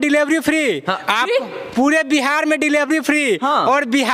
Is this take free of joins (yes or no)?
yes